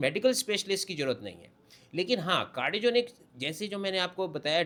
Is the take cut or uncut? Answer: uncut